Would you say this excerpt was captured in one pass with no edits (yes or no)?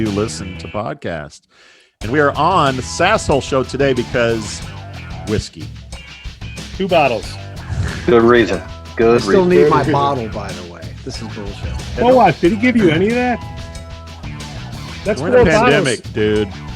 no